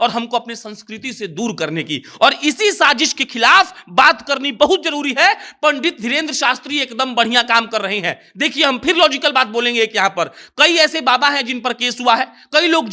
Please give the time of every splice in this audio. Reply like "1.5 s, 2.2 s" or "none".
none